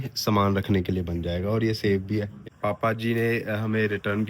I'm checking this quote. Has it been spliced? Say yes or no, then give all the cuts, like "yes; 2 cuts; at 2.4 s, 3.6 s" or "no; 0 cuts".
yes; 1 cut; at 2.4 s